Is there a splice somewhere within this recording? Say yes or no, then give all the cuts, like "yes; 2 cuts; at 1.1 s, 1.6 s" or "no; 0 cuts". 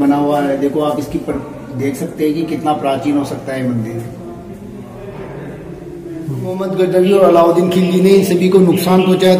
yes; 1 cut; at 6.6 s